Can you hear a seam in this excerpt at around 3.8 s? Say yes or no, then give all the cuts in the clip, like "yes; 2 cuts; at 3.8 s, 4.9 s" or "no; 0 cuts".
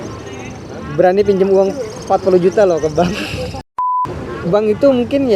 yes; 1 cut; at 3.8 s